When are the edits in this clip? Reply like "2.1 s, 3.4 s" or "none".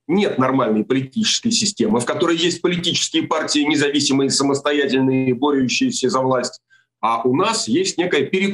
none